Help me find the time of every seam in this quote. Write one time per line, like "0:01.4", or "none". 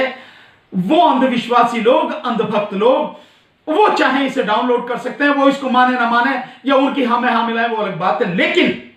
none

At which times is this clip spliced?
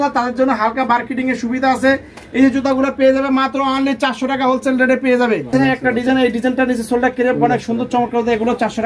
0:05.5

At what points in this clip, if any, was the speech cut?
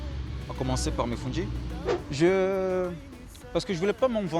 0:01.9

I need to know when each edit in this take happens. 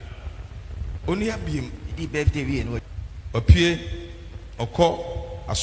0:02.8

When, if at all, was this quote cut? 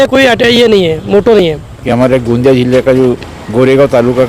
0:01.7

